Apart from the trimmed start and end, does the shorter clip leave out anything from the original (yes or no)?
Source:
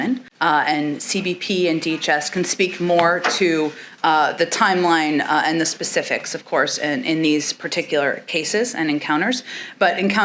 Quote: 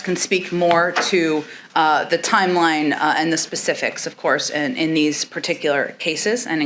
no